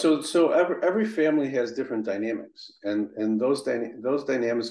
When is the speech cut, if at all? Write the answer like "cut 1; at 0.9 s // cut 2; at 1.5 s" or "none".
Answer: none